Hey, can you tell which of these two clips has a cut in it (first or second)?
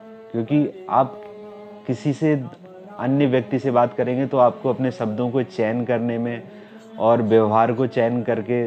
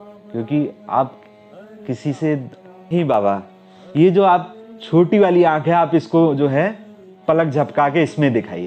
second